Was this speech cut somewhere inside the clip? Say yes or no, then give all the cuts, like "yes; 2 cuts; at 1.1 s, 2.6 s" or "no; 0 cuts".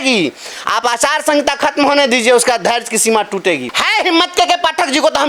yes; 1 cut; at 3.7 s